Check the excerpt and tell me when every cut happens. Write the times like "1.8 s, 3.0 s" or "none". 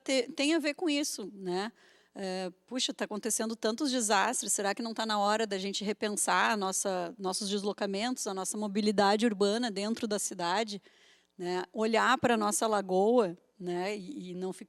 none